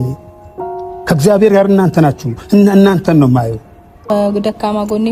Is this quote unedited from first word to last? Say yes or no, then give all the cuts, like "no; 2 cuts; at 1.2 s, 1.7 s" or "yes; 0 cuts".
no; 1 cut; at 4.1 s